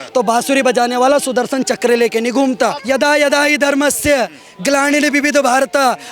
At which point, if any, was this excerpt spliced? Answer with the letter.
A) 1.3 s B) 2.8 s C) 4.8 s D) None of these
B